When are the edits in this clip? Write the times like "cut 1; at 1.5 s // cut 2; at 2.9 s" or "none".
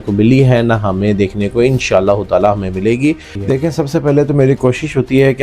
cut 1; at 3.3 s

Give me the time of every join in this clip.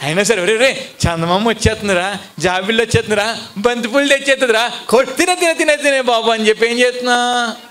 none

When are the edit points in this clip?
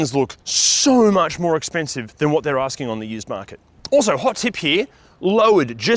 none

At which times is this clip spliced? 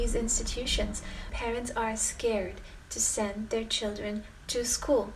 cut 1; at 1.3 s

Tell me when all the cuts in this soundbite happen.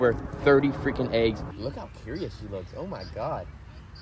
cut 1; at 1.4 s

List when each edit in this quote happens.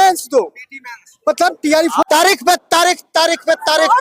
cut 1; at 2.0 s

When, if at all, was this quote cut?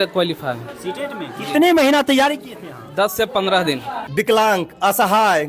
cut 1; at 3.9 s

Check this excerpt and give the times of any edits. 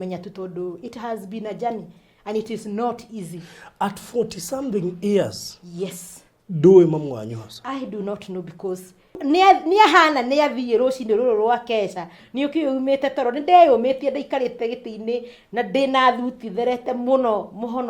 cut 1; at 9.2 s

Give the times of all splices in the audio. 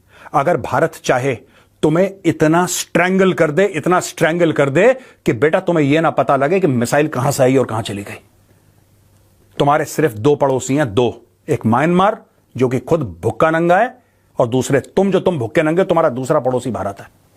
none

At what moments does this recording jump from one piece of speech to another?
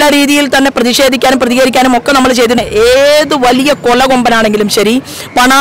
cut 1; at 2.6 s

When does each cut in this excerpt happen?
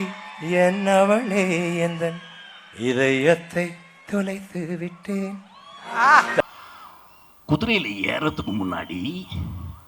cut 1; at 6.4 s

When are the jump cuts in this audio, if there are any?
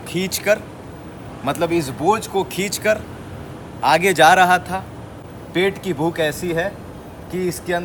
none

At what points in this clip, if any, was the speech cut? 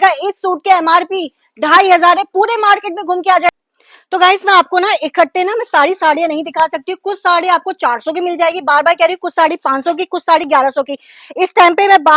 cut 1; at 3.6 s

